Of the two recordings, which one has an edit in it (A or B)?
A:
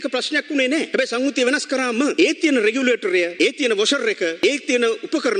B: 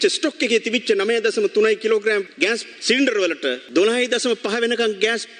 A